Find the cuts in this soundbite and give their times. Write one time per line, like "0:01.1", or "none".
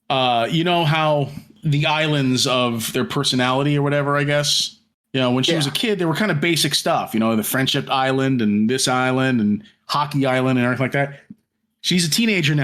0:01.5